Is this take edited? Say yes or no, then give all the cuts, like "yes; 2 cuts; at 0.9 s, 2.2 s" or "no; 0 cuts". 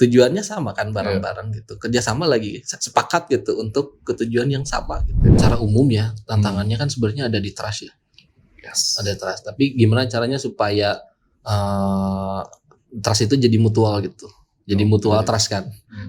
yes; 1 cut; at 5.4 s